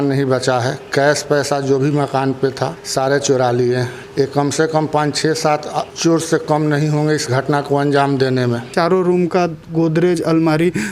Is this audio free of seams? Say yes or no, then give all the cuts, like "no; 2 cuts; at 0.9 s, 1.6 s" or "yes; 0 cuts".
no; 1 cut; at 8.7 s